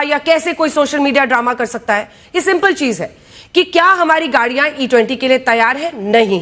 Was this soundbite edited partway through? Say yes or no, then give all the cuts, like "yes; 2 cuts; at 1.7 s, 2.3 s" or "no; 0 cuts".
no; 0 cuts